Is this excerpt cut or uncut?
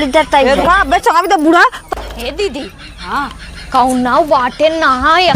cut